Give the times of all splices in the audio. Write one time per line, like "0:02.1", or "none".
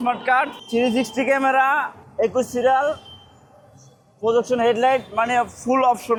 none

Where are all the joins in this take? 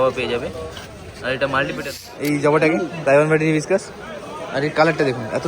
0:01.8

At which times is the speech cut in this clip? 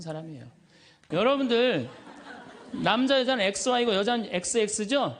0:01.3

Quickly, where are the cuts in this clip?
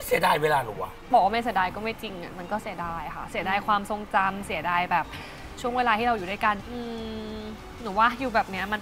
0:01.1
0:06.7

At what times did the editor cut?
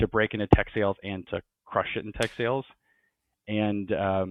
none

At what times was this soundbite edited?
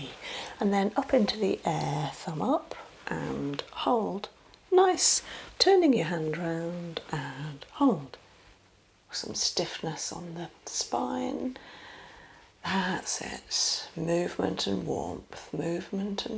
0:09.1

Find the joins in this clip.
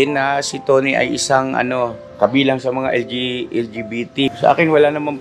0:02.0
0:04.3

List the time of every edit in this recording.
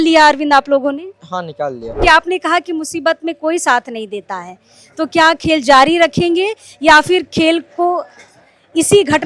0:02.0

